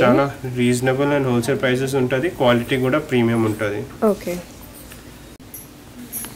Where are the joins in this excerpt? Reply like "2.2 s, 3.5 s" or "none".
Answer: 5.4 s